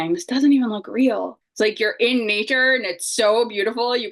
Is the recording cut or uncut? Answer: cut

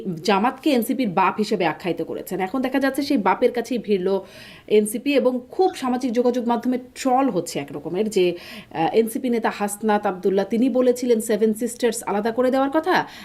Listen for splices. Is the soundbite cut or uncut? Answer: uncut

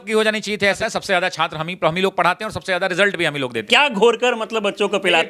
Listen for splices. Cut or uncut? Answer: cut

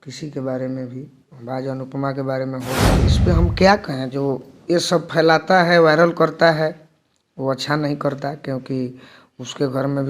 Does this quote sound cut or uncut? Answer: cut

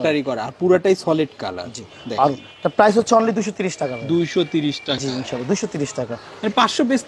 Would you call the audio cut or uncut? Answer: uncut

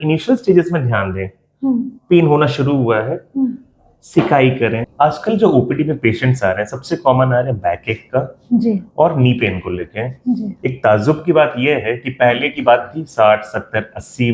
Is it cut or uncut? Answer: cut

